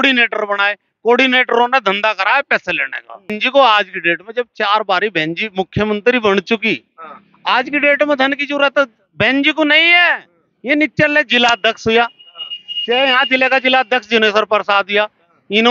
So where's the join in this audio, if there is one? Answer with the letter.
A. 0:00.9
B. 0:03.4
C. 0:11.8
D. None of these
B